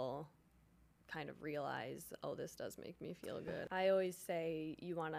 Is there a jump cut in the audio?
yes; 1 cut; at 3.7 s

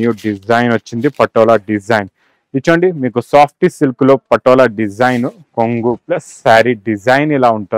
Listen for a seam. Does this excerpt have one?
no; 0 cuts

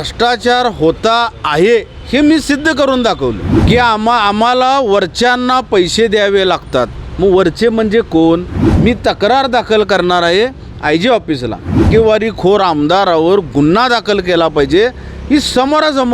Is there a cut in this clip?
yes; 3 cuts; at 3.5 s, 8.6 s, 11.8 s

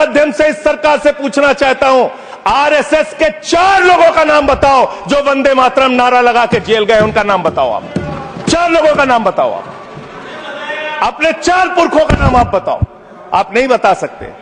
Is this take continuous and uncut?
yes; 0 cuts

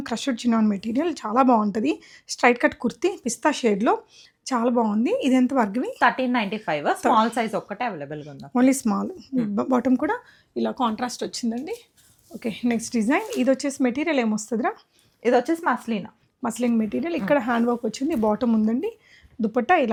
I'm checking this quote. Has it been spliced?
no; 0 cuts

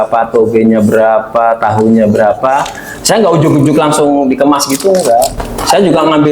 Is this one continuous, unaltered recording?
yes; 0 cuts

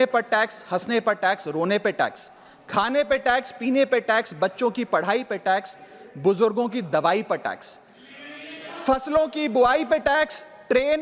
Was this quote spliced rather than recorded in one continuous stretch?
no; 0 cuts

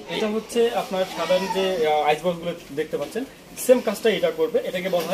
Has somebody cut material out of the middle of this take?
no; 0 cuts

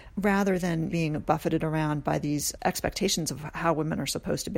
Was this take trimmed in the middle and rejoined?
yes; 2 cuts; at 0.9 s, 2.6 s

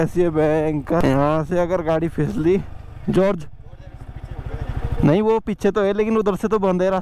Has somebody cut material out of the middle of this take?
yes; 2 cuts; at 1.0 s, 3.0 s

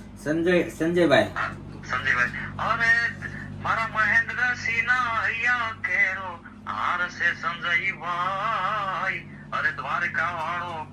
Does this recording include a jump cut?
no; 0 cuts

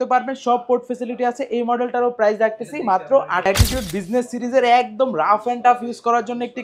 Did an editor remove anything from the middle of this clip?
yes; 1 cut; at 3.5 s

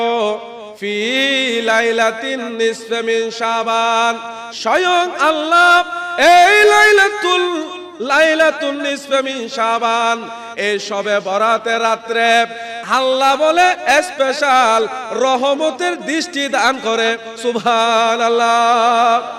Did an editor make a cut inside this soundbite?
no; 0 cuts

